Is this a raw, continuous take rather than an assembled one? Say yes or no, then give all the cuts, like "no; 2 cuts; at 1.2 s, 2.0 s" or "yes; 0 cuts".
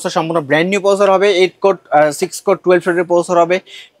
yes; 0 cuts